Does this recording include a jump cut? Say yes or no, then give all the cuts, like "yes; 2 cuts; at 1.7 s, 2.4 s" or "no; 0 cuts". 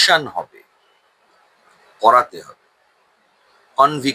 no; 0 cuts